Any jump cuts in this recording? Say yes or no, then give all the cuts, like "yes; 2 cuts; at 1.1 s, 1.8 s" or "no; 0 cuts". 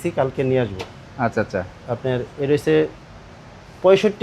no; 0 cuts